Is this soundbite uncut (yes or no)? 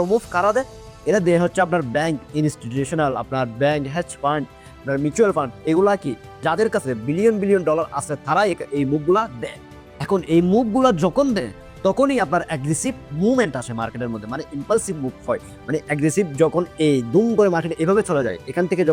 yes